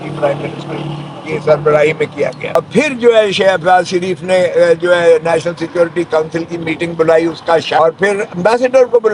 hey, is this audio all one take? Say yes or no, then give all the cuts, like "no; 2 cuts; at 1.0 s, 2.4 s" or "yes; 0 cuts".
no; 2 cuts; at 2.5 s, 7.8 s